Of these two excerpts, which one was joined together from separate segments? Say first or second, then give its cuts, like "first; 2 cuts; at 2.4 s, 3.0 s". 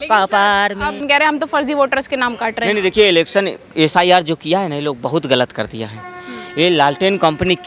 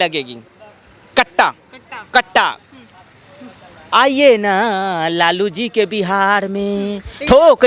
first; 1 cut; at 1.0 s